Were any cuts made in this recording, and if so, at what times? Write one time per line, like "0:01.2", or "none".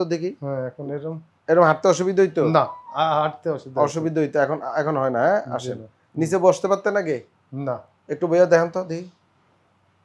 none